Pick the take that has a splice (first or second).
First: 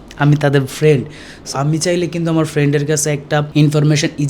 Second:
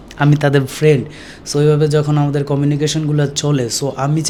first